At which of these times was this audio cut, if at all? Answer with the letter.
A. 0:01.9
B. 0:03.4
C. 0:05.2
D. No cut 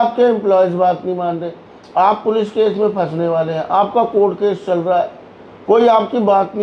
D